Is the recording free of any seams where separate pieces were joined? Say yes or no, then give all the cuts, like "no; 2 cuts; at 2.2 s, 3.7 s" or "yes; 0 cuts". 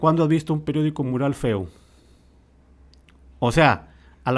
yes; 0 cuts